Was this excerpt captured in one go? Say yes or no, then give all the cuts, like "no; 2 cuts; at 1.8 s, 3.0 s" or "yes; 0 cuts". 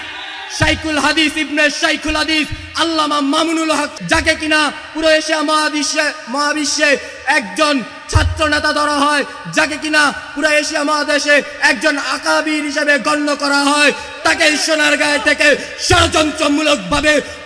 no; 1 cut; at 3.9 s